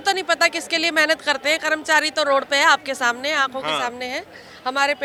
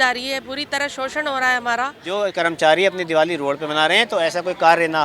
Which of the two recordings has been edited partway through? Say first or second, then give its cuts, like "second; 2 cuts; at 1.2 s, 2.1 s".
second; 1 cut; at 2.0 s